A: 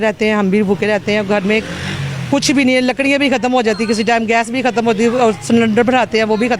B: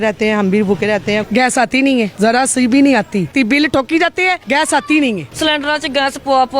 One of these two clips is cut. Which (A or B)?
B